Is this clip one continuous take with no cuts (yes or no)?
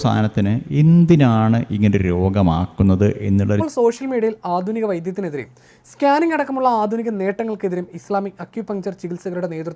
no